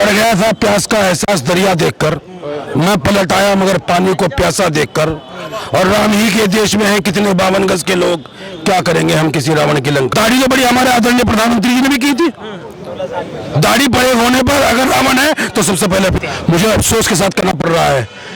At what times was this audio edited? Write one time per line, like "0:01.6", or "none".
0:10.1
0:16.2